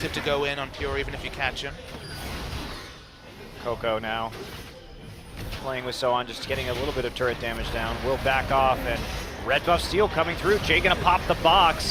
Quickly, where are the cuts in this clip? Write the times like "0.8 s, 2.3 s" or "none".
none